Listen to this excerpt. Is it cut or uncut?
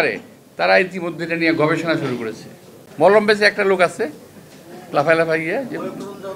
cut